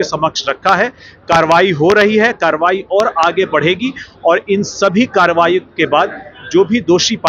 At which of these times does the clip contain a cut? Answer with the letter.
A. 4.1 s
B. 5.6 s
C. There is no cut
C